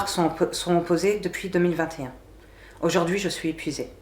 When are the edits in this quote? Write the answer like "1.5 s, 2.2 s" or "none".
none